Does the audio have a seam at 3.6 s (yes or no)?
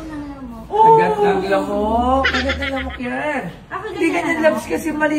no